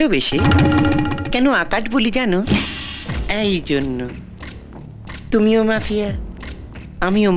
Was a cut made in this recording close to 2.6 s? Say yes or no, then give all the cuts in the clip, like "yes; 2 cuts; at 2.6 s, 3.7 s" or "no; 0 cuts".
yes; 1 cut; at 2.6 s